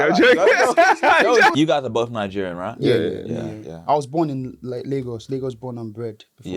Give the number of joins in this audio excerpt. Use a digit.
1